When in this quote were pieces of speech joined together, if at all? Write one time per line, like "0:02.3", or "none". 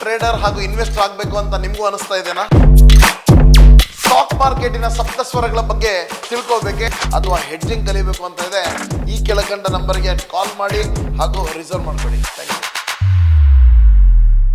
none